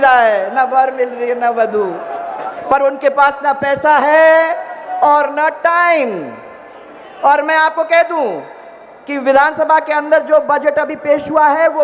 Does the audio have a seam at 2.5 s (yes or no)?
yes